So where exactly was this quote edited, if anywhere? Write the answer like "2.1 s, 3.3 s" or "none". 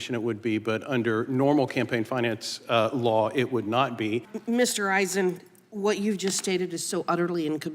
4.3 s